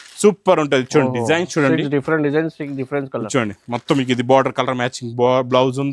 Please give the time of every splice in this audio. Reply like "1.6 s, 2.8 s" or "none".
none